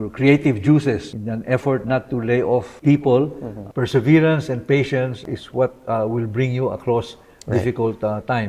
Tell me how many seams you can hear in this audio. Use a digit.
4